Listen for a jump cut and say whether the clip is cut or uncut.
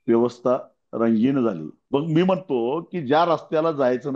cut